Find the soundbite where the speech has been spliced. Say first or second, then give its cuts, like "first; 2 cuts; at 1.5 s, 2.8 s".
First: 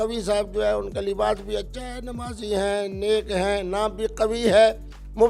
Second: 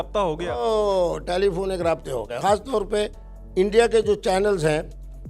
second; 1 cut; at 2.3 s